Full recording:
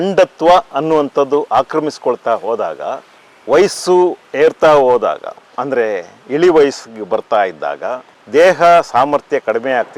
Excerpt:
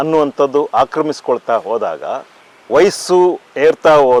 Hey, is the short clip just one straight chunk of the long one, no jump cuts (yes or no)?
yes